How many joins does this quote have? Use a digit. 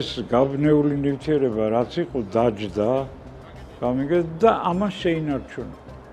0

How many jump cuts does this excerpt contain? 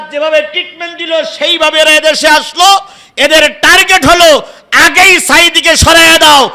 0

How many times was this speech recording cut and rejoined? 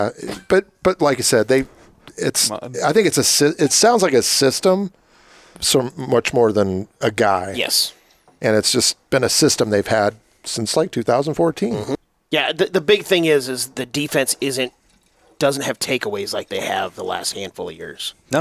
1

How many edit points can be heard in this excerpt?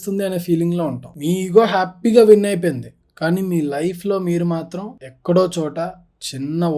1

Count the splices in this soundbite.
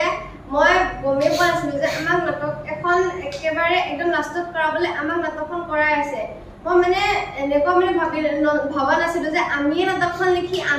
0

